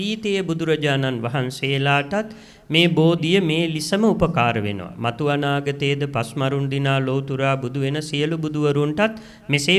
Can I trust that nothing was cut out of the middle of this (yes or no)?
yes